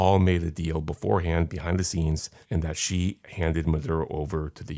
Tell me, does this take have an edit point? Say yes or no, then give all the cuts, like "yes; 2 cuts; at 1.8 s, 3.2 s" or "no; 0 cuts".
yes; 2 cuts; at 2.3 s, 3.3 s